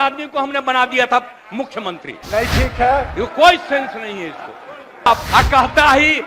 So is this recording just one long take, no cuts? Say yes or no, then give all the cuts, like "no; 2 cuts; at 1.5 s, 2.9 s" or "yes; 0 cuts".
no; 1 cut; at 5.1 s